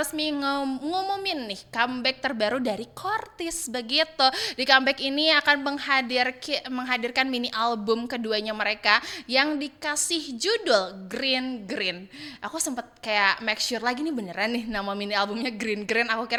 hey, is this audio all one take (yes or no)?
yes